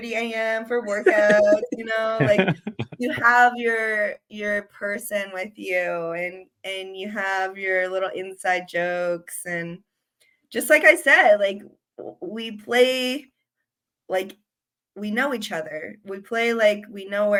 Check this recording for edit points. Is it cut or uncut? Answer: uncut